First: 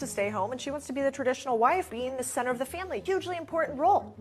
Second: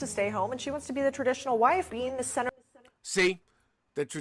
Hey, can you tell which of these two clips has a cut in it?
first; 1 cut; at 2.5 s

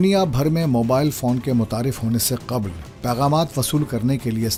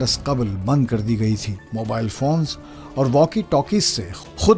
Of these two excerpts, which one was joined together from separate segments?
second; 1 cut; at 1.6 s

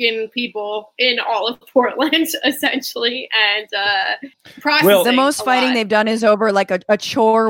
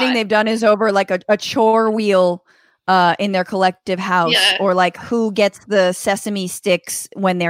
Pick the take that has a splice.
first; 1 cut; at 4.3 s

